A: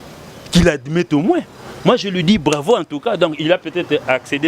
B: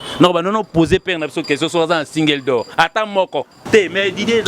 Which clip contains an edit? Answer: B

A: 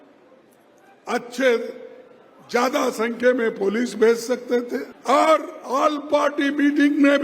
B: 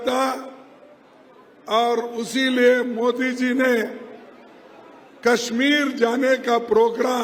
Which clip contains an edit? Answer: A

